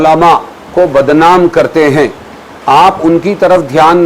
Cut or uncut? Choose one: uncut